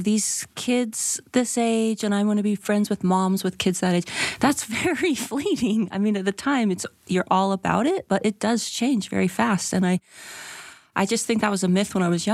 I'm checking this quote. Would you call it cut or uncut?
uncut